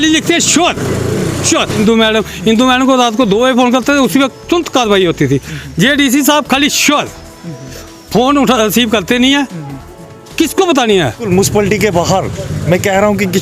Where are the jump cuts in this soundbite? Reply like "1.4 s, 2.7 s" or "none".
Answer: 1.8 s, 4.4 s, 11.3 s